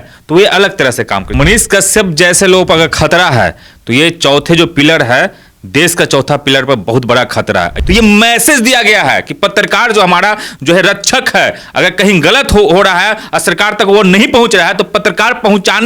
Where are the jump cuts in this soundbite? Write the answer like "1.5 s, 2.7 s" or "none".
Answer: 1.3 s, 7.8 s